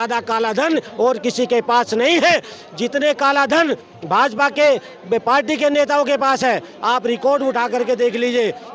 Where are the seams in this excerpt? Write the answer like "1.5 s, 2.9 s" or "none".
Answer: none

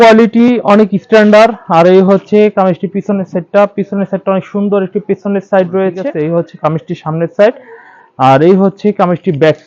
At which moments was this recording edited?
6.0 s

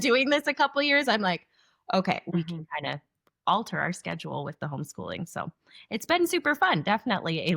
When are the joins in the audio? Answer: 2.3 s

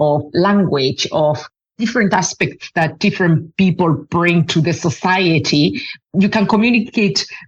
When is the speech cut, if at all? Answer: 5.9 s

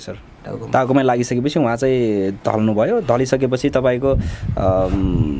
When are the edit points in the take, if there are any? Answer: none

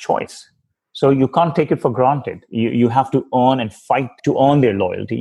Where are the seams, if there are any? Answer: 4.2 s

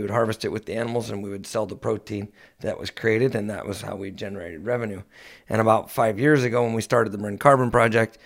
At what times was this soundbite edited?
none

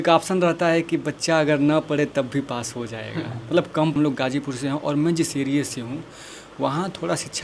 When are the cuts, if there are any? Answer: 3.9 s

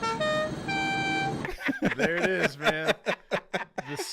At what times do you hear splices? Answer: 1.4 s

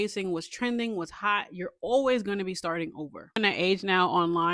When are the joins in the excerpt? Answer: 3.4 s

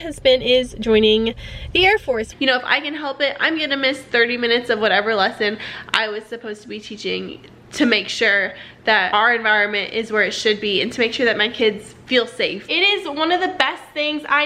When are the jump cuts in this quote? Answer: 2.3 s, 12.6 s

